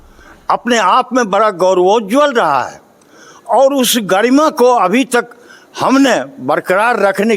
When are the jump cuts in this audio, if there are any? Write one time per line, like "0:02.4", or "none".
none